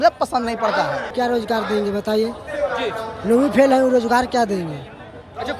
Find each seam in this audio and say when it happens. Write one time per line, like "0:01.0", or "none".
0:01.1